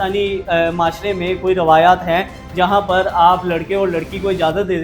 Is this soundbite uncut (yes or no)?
yes